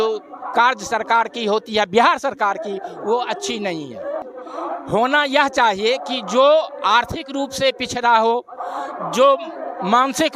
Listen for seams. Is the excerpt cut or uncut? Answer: cut